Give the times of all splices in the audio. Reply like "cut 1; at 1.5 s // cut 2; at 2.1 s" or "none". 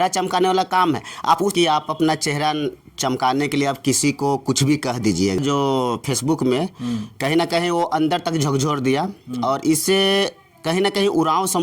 cut 1; at 1.5 s // cut 2; at 5.4 s